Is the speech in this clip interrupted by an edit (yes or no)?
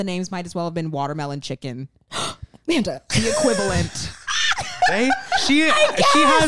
no